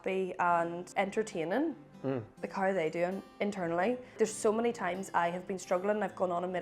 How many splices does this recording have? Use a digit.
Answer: 3